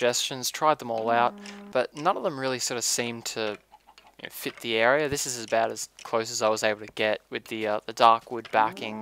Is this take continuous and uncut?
no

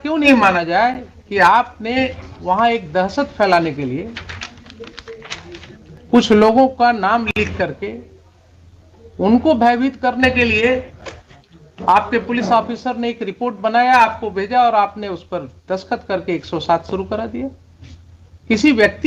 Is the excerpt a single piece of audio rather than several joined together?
yes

